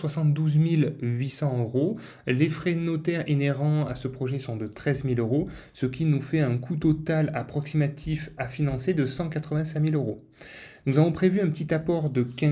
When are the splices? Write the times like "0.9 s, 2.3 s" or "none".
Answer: none

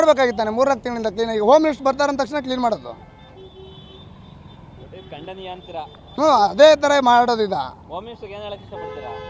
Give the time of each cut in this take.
none

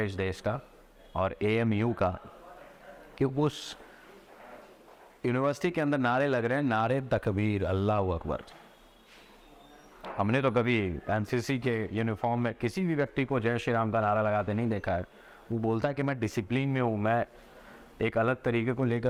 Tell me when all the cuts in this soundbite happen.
none

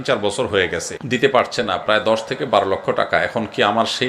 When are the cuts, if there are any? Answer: 0.9 s

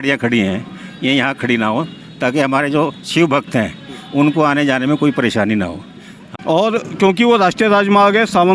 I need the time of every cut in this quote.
6.2 s

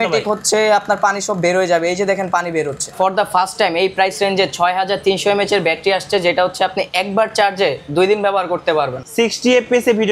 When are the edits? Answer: 2.9 s, 9.0 s

